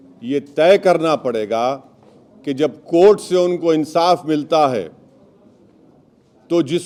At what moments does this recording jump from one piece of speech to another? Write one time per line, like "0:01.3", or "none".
none